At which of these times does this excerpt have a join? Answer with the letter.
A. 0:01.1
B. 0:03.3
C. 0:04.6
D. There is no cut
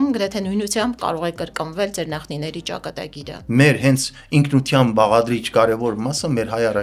B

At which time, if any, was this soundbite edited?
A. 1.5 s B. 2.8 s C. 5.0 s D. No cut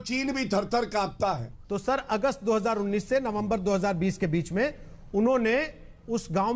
A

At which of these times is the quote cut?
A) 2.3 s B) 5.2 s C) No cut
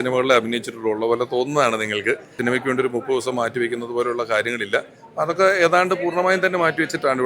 A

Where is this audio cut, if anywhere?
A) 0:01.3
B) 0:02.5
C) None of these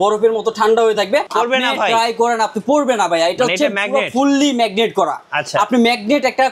A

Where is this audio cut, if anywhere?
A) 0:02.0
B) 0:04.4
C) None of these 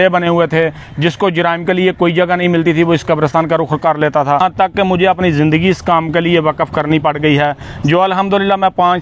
B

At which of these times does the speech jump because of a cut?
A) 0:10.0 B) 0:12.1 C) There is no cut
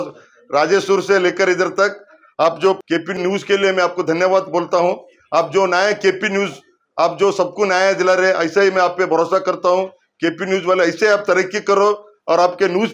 C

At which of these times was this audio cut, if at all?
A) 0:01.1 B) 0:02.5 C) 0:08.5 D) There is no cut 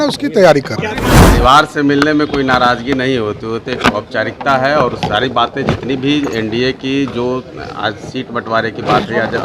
A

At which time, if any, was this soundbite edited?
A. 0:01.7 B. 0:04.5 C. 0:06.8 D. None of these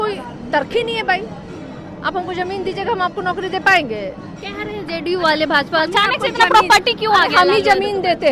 D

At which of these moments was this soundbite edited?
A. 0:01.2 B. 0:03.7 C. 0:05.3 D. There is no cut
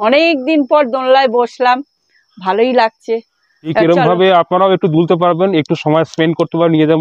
B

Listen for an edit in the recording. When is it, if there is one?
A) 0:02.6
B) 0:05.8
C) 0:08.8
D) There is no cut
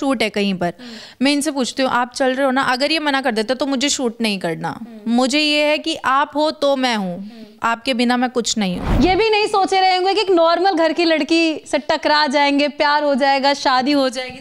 C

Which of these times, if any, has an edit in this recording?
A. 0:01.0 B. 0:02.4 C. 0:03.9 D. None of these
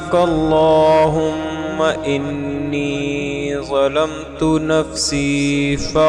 D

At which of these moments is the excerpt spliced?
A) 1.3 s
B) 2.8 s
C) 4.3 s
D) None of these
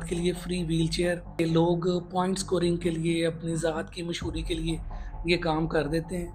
A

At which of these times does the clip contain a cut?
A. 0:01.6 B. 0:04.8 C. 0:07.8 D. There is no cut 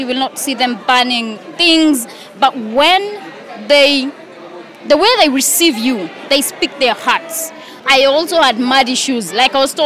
C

